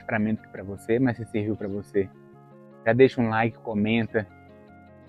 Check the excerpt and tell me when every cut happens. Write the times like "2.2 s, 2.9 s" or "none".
none